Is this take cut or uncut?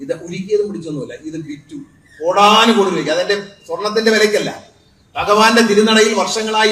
uncut